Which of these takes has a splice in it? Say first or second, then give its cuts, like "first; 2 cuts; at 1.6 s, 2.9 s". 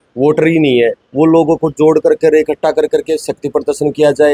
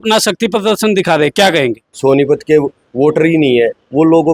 second; 1 cut; at 1.9 s